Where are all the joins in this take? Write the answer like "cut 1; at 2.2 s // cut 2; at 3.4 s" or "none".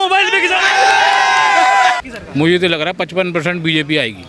cut 1; at 2.0 s